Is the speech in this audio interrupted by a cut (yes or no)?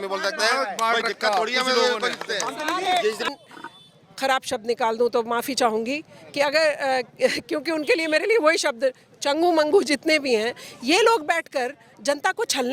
yes